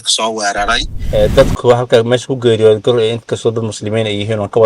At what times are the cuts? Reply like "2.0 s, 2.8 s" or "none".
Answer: 0.9 s